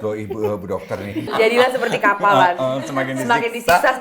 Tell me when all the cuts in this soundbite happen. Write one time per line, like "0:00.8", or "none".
0:01.2

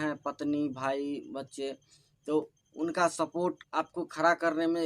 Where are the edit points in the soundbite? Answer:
0:02.6
0:03.6

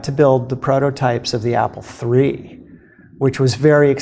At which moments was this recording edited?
none

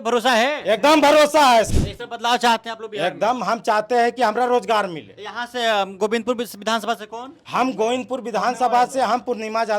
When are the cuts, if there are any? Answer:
0:01.7

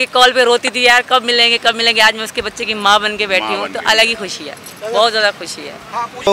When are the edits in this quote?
none

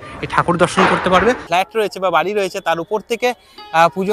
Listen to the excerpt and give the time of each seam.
0:01.4

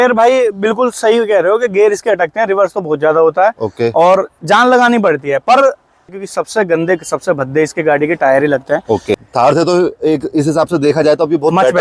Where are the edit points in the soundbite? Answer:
0:06.0
0:09.2

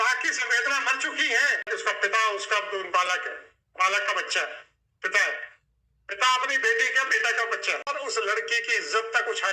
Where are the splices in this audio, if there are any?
0:01.6
0:07.9

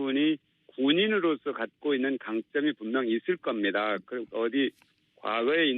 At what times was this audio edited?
0:02.3

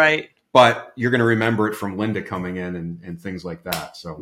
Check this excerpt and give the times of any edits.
none

